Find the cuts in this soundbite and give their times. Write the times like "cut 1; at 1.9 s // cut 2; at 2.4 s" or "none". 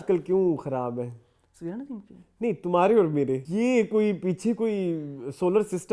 cut 1; at 3.5 s